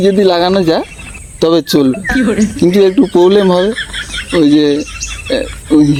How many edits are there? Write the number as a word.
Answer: zero